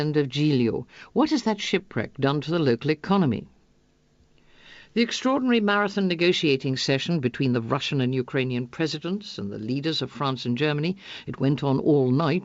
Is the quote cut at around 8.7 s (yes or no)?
yes